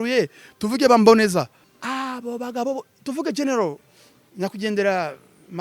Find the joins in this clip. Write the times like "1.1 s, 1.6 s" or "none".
1.7 s